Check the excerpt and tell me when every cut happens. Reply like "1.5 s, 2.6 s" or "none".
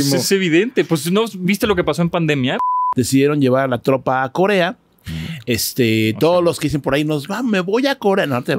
2.6 s